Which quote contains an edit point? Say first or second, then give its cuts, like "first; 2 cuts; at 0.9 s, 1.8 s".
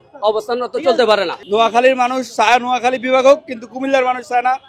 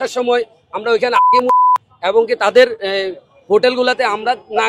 first; 1 cut; at 1.4 s